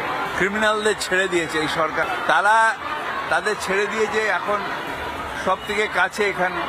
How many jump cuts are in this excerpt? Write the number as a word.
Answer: one